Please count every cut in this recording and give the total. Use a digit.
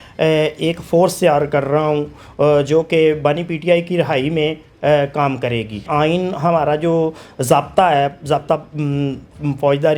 1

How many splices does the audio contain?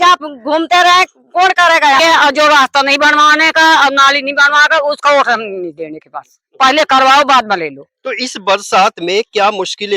1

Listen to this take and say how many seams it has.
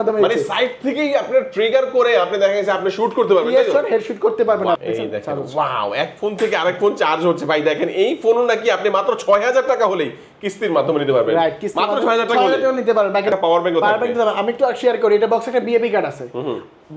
2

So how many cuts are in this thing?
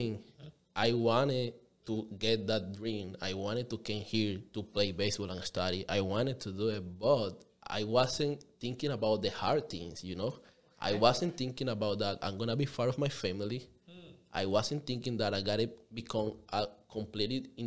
0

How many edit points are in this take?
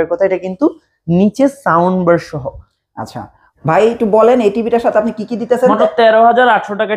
1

